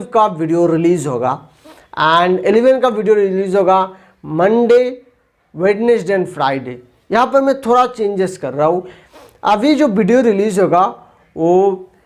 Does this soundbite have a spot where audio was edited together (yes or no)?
no